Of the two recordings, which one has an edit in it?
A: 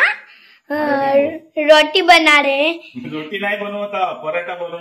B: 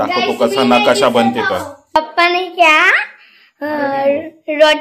B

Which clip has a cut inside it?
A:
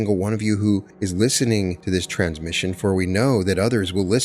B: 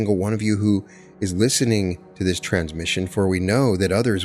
A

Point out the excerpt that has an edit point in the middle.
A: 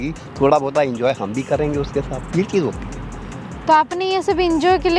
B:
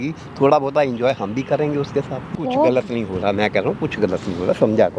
B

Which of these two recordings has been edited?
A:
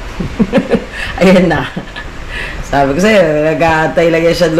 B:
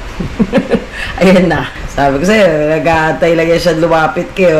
B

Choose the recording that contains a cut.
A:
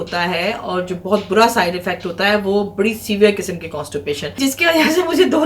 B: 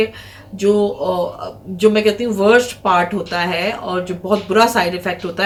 A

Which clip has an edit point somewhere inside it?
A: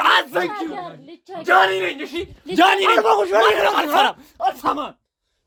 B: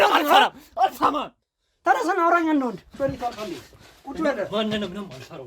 B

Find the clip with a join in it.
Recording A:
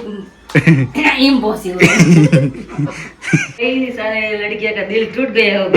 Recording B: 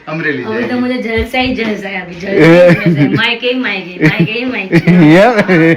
A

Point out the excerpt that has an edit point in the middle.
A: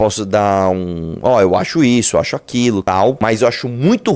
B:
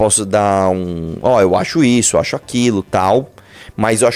A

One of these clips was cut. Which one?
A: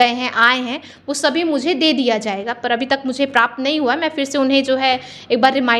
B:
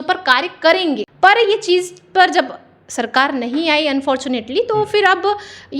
B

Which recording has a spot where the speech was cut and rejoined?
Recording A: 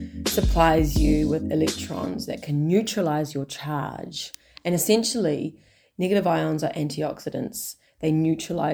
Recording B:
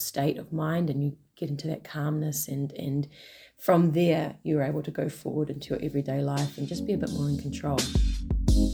B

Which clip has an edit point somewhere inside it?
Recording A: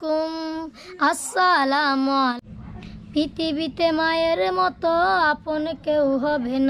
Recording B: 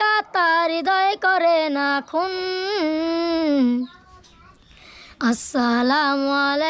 A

